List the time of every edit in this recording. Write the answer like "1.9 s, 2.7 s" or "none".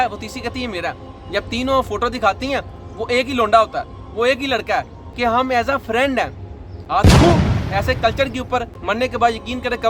5.0 s, 8.7 s